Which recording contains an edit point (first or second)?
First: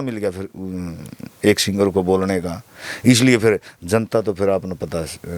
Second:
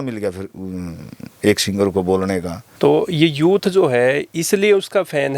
second